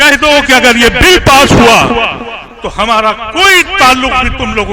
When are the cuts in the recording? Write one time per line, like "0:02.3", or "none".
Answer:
none